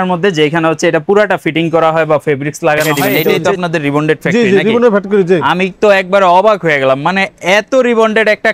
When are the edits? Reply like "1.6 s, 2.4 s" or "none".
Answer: 3.0 s